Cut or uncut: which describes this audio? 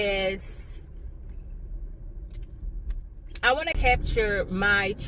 cut